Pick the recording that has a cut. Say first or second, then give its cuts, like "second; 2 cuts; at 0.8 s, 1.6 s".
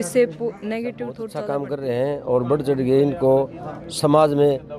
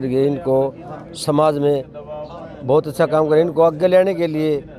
first; 1 cut; at 1.3 s